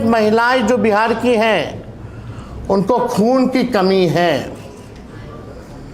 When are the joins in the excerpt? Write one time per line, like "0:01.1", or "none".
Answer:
none